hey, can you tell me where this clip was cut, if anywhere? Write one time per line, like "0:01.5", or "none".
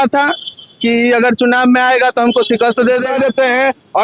0:03.1